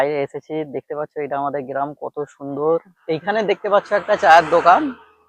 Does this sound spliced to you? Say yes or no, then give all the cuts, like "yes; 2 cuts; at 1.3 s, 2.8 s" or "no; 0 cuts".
yes; 1 cut; at 2.9 s